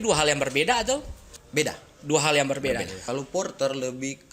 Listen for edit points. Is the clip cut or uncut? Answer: cut